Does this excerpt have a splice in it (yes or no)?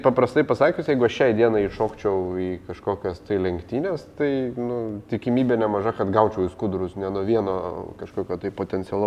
no